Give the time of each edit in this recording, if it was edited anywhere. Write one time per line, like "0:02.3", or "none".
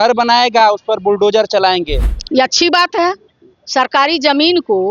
0:02.0